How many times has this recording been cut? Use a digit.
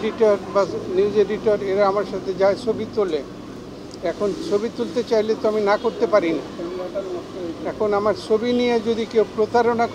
0